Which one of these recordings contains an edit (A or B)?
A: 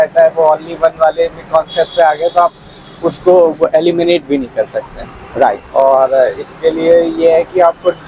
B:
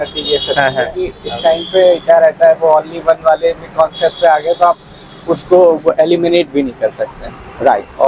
B